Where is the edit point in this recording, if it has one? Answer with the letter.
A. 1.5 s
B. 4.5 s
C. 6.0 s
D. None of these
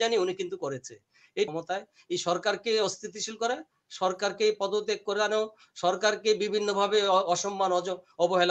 A